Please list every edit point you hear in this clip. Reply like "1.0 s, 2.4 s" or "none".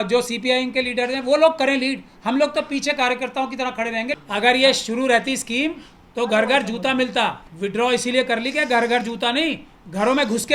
4.2 s, 7.5 s